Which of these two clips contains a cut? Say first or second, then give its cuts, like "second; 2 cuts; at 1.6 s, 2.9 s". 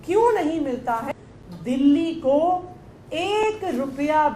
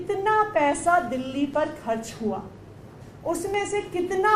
first; 1 cut; at 1.1 s